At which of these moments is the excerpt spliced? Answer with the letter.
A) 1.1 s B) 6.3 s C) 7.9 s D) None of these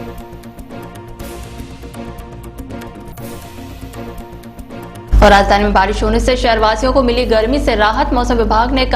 D